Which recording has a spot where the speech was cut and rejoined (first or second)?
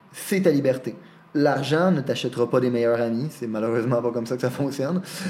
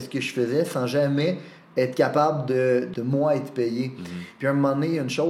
second